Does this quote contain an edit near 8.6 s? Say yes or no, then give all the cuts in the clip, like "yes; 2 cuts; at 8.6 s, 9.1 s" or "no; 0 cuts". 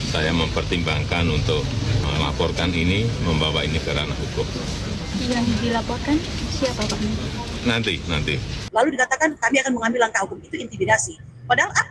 yes; 1 cut; at 8.6 s